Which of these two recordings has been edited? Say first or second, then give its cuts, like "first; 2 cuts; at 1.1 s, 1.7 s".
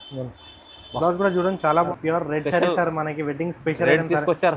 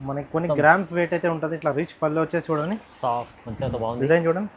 first; 1 cut; at 1.8 s